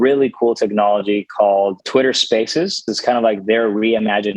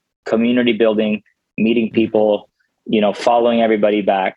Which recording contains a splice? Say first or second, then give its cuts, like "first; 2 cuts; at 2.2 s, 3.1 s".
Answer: first; 2 cuts; at 1.8 s, 2.9 s